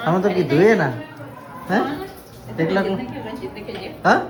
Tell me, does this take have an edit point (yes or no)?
no